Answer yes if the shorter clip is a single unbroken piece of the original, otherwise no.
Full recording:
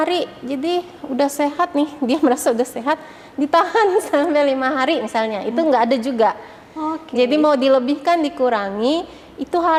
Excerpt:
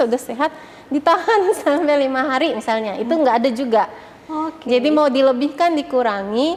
yes